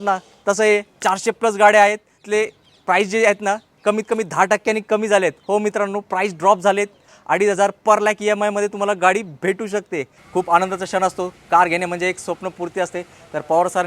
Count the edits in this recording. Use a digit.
3